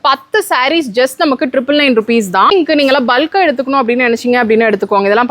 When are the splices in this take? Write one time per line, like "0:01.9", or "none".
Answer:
0:02.5